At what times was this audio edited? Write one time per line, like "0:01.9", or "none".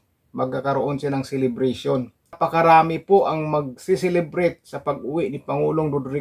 0:02.4